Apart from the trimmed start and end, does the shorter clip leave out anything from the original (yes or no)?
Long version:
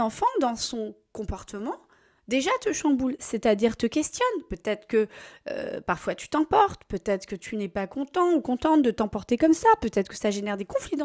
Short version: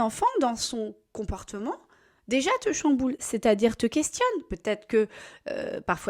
no